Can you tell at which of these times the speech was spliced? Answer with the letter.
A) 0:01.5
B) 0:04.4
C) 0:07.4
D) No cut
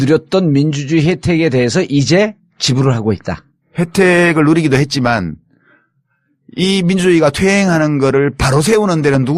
D